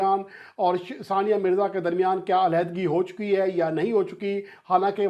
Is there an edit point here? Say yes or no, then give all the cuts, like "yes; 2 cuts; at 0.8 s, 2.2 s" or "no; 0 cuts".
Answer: no; 0 cuts